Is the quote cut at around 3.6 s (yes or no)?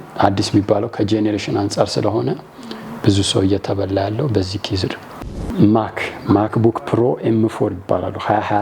no